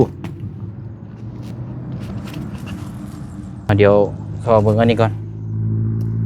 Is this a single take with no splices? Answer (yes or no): no